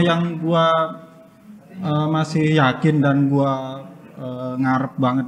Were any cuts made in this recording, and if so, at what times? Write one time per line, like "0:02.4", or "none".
none